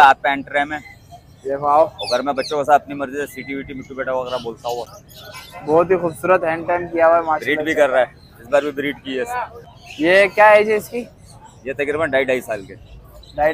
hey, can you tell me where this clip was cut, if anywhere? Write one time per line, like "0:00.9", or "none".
none